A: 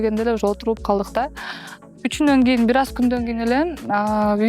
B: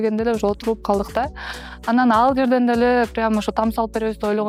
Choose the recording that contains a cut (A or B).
A